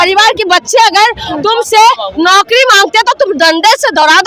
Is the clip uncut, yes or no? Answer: yes